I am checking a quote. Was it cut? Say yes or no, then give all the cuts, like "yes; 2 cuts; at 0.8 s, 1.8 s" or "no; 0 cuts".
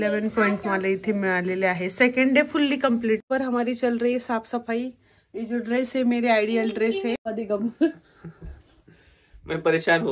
yes; 2 cuts; at 3.2 s, 7.3 s